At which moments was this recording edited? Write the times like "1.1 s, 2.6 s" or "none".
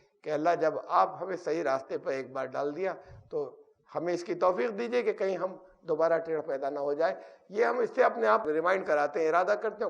8.4 s